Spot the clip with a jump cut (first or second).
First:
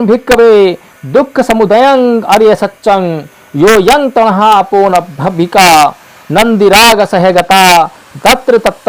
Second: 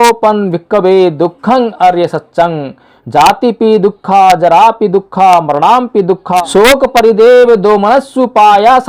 second